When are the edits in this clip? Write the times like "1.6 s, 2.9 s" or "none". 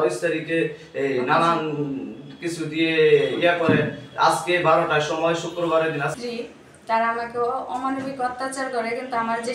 6.1 s